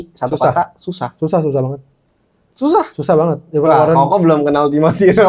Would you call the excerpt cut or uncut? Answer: uncut